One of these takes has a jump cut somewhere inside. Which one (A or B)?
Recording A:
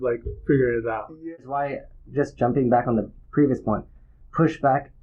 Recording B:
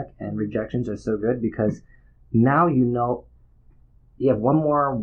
A